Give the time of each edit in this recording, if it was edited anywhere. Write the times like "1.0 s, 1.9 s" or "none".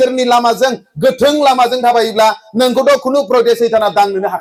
none